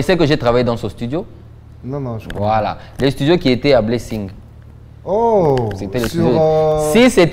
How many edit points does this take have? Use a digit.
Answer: 0